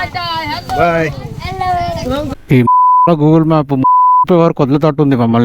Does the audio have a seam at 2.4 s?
yes; 1 cut; at 2.4 s

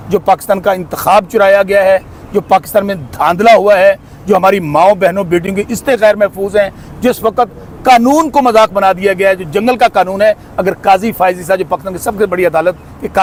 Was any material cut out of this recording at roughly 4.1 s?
no; 0 cuts

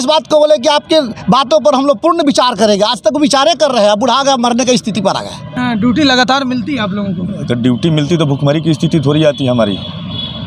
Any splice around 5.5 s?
yes; 1 cut; at 5.5 s

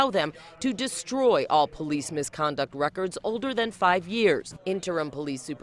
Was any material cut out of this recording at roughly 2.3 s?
no; 1 cut; at 4.5 s

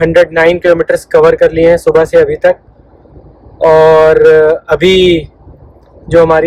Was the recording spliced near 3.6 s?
no; 0 cuts

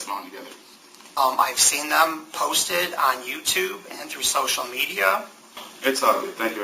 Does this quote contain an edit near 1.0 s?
yes; 2 cuts; at 1.0 s, 5.6 s

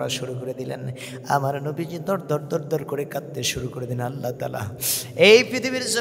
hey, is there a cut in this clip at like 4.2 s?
no; 0 cuts

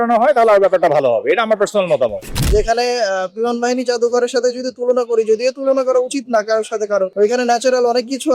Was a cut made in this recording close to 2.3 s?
yes; 1 cut; at 2.3 s

